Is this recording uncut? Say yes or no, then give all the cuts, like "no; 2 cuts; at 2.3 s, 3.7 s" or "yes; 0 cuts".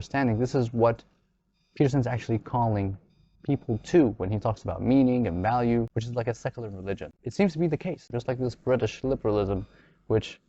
no; 3 cuts; at 5.9 s, 7.2 s, 8.1 s